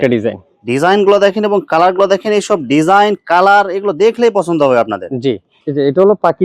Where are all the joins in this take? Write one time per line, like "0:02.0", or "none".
0:05.5